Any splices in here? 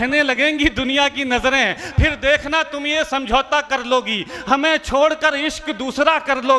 no; 0 cuts

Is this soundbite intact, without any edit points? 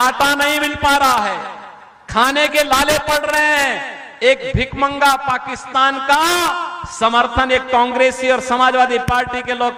yes; 0 cuts

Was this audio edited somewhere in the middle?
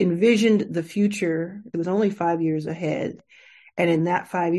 yes; 2 cuts; at 1.7 s, 3.2 s

